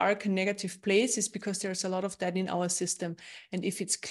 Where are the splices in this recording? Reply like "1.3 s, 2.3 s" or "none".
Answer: none